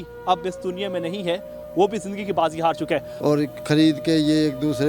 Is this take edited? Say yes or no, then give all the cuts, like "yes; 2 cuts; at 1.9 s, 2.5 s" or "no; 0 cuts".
yes; 1 cut; at 3.1 s